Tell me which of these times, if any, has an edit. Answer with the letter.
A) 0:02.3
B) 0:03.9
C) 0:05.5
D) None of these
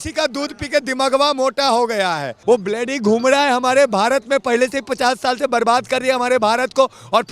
A